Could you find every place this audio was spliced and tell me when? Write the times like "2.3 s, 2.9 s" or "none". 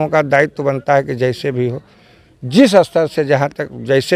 none